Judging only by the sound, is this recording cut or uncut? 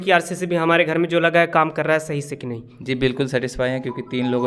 uncut